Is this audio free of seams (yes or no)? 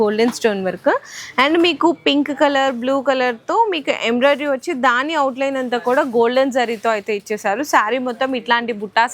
yes